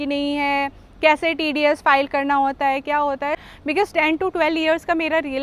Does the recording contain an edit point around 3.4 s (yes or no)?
yes